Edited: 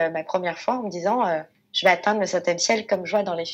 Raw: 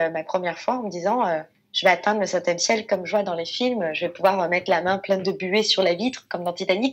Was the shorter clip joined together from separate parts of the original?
no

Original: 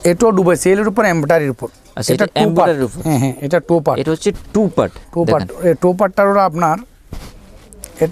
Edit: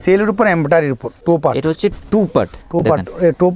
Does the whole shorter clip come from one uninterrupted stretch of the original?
no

